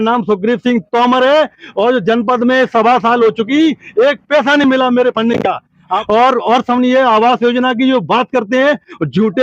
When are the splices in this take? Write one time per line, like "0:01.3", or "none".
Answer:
0:06.0